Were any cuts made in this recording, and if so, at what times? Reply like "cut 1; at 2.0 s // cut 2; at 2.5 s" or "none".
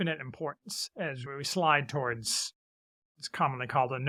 none